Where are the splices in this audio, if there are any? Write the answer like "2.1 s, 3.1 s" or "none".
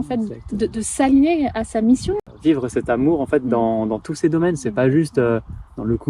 2.2 s